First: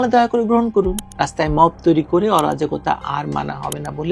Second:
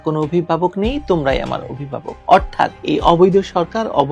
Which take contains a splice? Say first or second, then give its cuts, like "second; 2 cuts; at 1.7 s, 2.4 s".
first; 1 cut; at 1.0 s